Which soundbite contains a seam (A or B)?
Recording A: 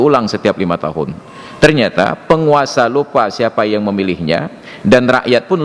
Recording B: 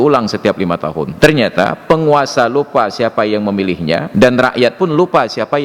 B